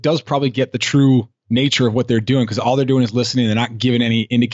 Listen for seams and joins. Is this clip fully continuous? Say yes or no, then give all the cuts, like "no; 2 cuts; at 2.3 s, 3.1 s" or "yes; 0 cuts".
yes; 0 cuts